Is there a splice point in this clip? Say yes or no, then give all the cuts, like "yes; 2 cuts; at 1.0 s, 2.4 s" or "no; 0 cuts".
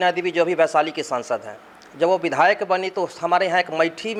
no; 0 cuts